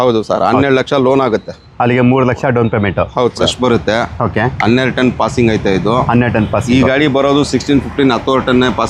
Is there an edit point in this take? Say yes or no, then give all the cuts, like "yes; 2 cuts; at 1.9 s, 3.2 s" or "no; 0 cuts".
yes; 1 cut; at 3.5 s